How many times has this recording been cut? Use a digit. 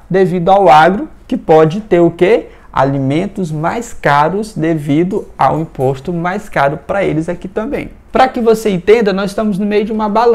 1